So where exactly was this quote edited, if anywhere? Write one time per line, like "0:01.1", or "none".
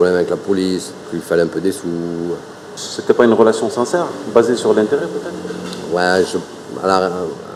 none